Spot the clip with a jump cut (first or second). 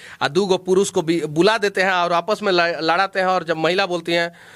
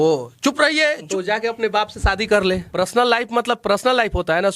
second